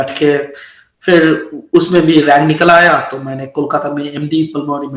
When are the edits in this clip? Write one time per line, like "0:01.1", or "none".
none